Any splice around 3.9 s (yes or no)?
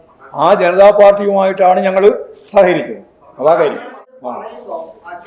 yes